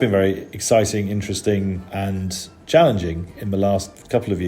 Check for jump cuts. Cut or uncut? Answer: cut